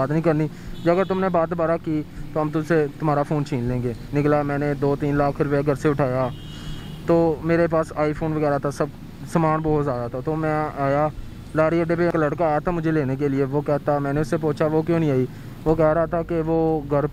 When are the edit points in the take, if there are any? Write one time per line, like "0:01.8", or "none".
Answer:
0:04.0
0:12.1